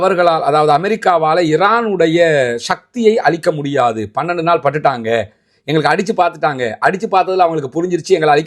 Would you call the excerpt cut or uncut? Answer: uncut